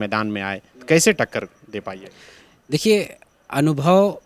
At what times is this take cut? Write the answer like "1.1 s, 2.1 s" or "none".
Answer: none